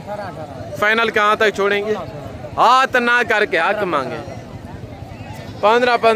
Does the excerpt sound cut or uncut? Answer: uncut